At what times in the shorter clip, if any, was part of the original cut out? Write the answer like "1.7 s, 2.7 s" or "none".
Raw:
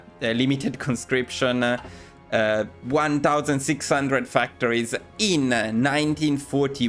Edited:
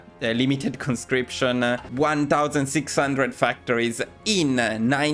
1.9 s